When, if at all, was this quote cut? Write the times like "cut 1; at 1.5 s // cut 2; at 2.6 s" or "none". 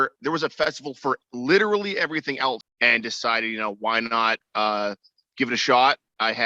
cut 1; at 2.7 s

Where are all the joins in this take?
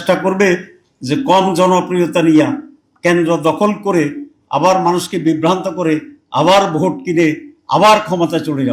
none

